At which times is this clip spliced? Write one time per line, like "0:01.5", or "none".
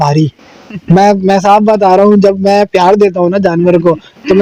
none